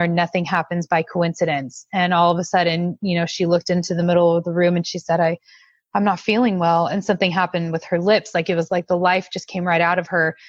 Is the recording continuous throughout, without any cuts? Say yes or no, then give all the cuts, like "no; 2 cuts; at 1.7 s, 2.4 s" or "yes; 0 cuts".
yes; 0 cuts